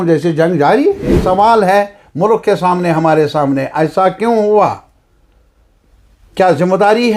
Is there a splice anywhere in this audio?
yes; 1 cut; at 1.2 s

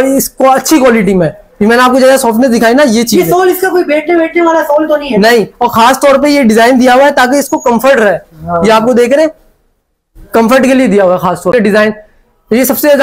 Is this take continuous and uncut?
no; 1 cut; at 11.5 s

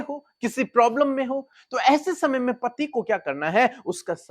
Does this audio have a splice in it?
yes; 1 cut; at 1.5 s

